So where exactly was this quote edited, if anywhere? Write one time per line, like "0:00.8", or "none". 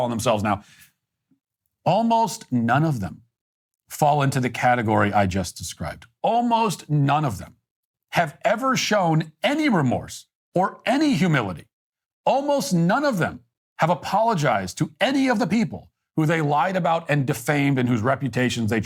none